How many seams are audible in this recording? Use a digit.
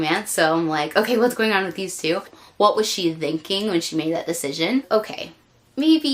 2